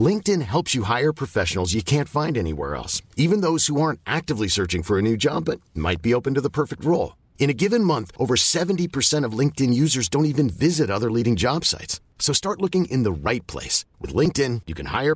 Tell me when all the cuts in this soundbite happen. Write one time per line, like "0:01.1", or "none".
none